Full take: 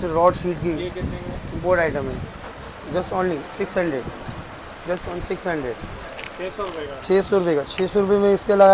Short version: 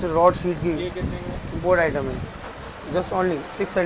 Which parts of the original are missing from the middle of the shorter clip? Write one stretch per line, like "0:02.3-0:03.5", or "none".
none